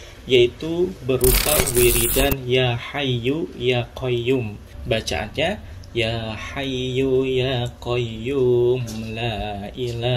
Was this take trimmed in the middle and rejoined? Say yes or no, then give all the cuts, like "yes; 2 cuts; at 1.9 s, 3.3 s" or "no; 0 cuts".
no; 0 cuts